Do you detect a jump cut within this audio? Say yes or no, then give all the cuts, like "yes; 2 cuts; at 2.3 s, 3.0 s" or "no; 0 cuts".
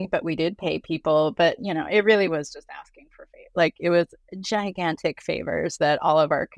no; 0 cuts